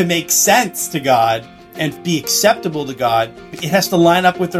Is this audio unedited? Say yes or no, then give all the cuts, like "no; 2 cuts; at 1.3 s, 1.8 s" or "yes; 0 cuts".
no; 2 cuts; at 1.9 s, 3.5 s